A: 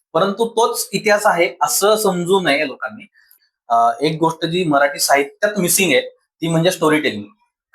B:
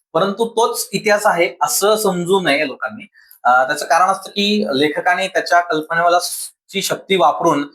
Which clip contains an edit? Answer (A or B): A